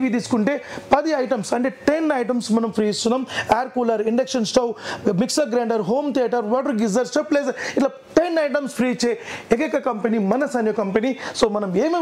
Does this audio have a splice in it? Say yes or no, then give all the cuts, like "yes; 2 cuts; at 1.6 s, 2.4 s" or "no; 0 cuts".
no; 0 cuts